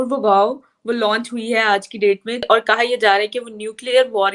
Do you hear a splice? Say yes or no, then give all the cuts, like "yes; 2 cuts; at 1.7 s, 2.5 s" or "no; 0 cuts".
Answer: yes; 1 cut; at 2.4 s